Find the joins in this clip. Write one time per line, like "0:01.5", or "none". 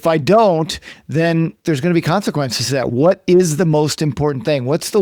0:02.9